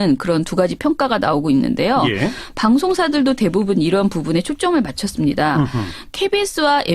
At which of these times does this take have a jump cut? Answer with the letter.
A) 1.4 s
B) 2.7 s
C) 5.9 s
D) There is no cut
B